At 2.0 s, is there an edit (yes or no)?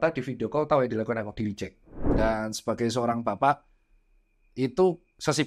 yes